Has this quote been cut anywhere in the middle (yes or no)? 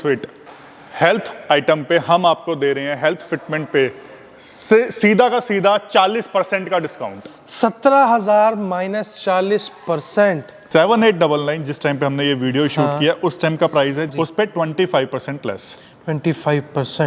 yes